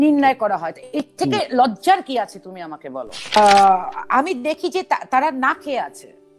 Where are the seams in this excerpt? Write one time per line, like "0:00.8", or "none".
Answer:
0:03.4